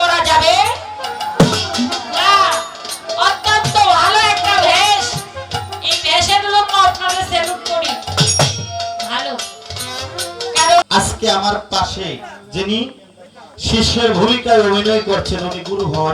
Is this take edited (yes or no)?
yes